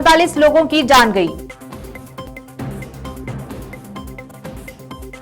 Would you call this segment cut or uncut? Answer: cut